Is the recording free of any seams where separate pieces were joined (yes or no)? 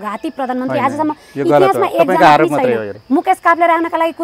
no